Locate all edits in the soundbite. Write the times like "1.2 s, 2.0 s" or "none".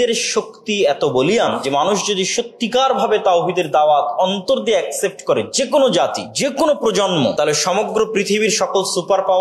1.5 s, 6.2 s, 7.3 s

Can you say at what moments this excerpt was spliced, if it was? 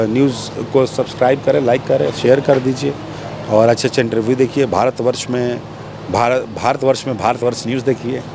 none

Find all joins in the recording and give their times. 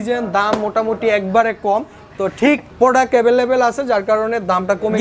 2.7 s

